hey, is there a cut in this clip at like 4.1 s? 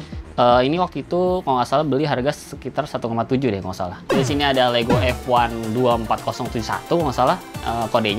yes; 1 cut; at 4.1 s

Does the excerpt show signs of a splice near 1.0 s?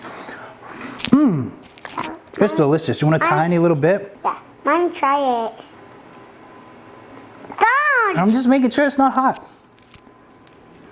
yes; 3 cuts; at 1.0 s, 4.1 s, 5.7 s

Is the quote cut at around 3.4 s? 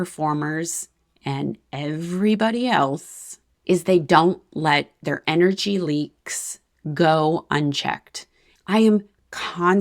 no; 1 cut; at 8.5 s

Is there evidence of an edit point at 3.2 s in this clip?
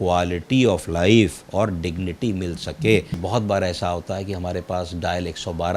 yes; 1 cut; at 3.2 s

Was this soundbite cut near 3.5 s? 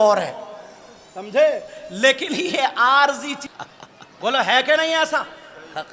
yes; 1 cut; at 3.5 s

